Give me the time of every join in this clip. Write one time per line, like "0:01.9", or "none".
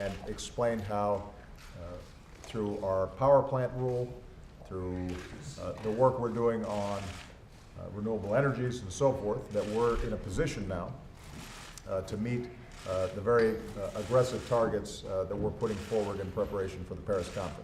none